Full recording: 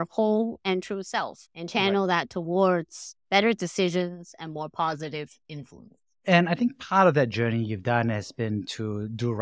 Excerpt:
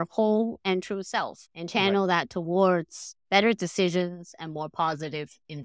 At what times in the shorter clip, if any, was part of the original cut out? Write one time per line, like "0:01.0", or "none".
none